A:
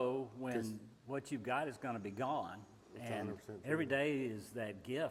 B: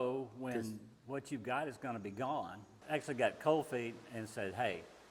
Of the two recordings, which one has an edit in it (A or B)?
B